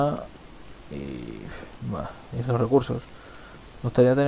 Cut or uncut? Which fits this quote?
uncut